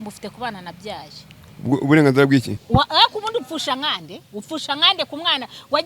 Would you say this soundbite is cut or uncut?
cut